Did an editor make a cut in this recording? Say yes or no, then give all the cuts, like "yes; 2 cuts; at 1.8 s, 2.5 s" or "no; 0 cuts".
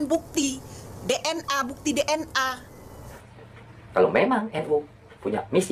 yes; 1 cut; at 3.2 s